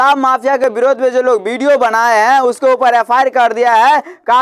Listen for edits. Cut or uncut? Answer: uncut